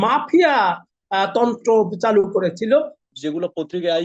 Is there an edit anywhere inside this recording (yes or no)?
yes